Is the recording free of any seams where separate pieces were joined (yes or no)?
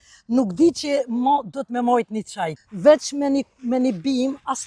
no